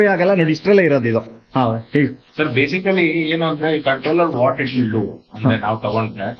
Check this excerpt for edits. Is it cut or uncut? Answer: uncut